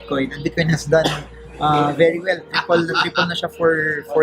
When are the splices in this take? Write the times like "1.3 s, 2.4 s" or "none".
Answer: none